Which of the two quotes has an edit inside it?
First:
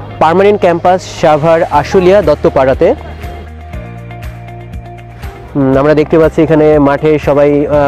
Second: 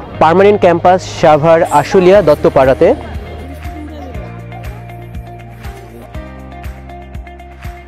first; 2 cuts; at 3.7 s, 5.5 s

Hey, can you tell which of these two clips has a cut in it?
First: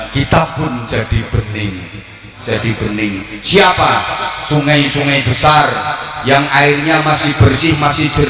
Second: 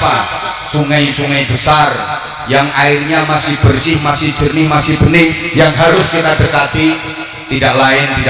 first; 1 cut; at 2.4 s

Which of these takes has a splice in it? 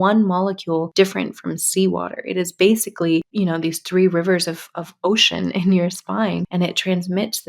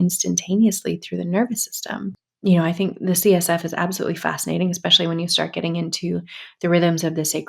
first; 2 cuts; at 3.3 s, 6.5 s

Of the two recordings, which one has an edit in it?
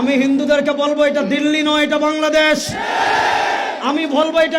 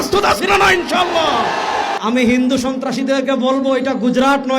second; 1 cut; at 2.0 s

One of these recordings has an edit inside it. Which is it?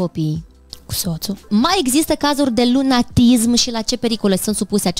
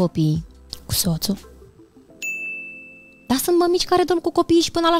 first; 1 cut; at 1.5 s

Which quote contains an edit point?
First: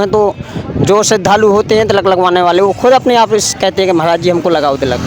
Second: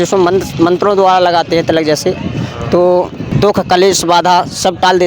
second; 1 cut; at 3.3 s

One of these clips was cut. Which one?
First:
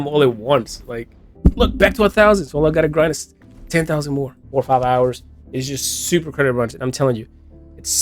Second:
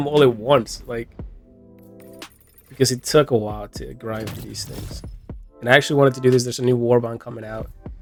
first; 2 cuts; at 1.2 s, 4.4 s

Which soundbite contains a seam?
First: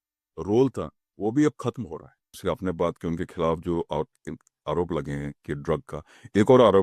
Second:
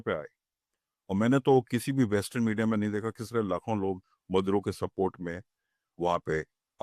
first; 1 cut; at 2.4 s

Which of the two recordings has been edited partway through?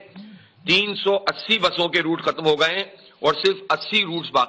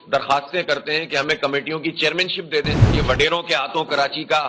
second; 1 cut; at 2.7 s

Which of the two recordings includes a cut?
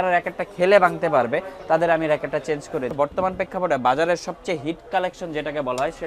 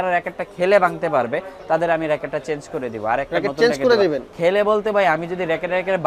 first; 1 cut; at 2.9 s

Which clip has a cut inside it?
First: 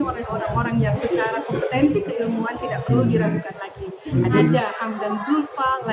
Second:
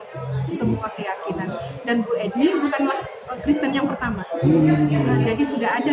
first; 2 cuts; at 1.0 s, 4.4 s

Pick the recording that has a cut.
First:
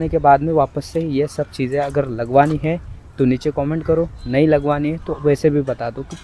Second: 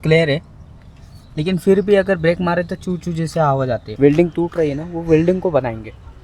second; 1 cut; at 3.9 s

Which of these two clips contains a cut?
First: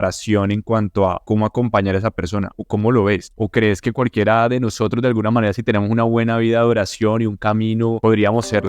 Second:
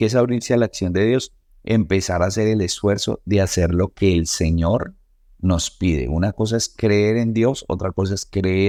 first; 4 cuts; at 1.2 s, 2.6 s, 3.3 s, 8.0 s

